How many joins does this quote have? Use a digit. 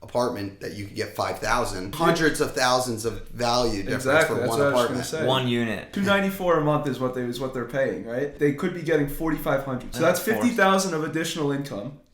4